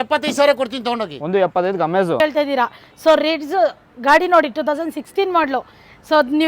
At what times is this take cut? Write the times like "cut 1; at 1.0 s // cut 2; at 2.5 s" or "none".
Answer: cut 1; at 2.2 s